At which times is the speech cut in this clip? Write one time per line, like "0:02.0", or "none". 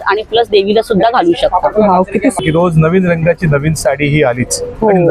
0:02.4